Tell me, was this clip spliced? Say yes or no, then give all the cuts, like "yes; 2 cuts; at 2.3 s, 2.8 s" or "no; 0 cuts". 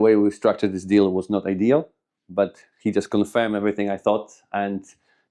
no; 0 cuts